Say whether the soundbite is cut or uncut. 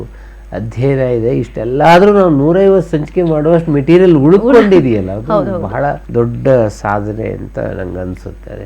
uncut